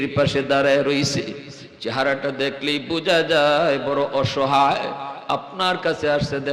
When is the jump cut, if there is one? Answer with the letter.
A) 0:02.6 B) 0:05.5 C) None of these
C